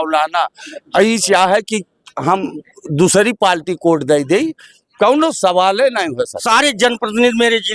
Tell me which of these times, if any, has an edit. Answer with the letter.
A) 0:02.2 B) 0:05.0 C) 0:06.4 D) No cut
C